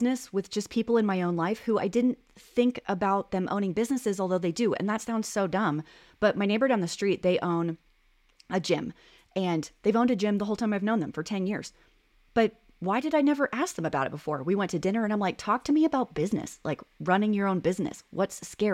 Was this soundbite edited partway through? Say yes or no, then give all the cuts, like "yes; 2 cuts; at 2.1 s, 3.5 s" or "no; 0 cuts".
no; 0 cuts